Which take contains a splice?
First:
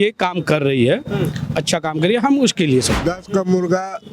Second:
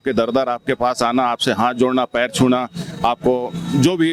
first; 1 cut; at 2.9 s

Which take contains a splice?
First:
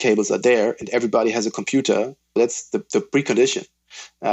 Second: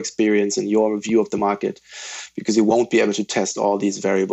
first; 1 cut; at 2.4 s

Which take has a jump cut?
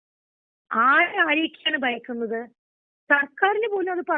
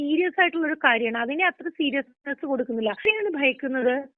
second; 1 cut; at 3.1 s

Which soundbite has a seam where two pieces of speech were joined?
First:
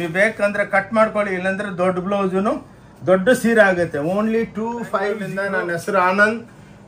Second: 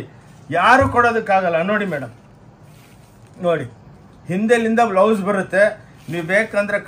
first; 1 cut; at 5.2 s

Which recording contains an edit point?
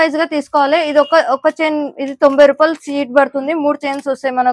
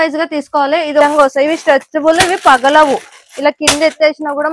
second; 1 cut; at 1.0 s

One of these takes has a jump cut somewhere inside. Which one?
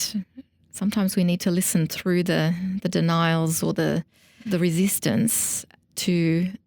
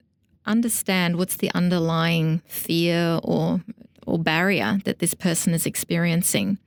first; 1 cut; at 4.3 s

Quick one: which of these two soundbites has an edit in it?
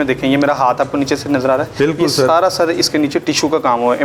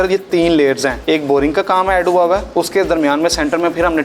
second; 2 cuts; at 0.9 s, 2.5 s

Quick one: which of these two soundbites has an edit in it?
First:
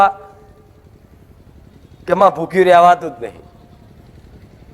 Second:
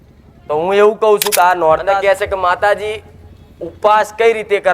second; 1 cut; at 1.8 s

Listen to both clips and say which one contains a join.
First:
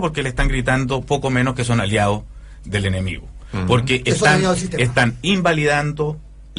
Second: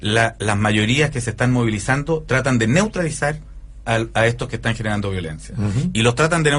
second; 1 cut; at 1.8 s

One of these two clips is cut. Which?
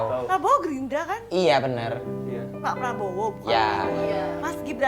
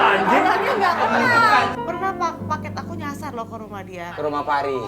second; 1 cut; at 1.8 s

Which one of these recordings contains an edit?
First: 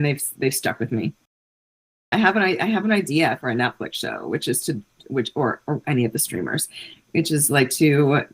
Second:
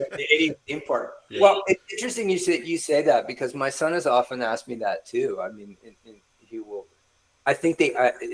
first; 1 cut; at 1.9 s

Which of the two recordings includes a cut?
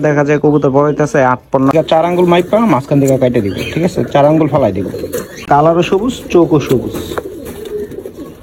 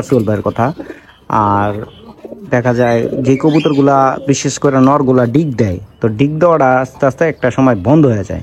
first; 2 cuts; at 1.7 s, 5.4 s

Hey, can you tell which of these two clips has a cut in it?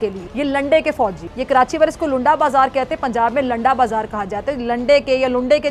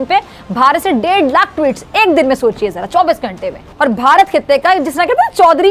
second; 1 cut; at 3.7 s

